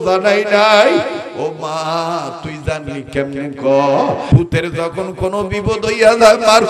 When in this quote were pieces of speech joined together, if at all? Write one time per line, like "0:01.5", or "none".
0:04.3